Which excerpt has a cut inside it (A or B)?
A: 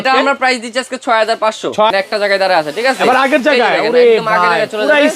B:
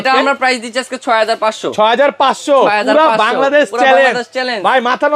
A